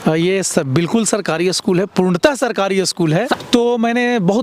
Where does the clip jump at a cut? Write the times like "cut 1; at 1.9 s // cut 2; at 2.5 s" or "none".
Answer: cut 1; at 3.4 s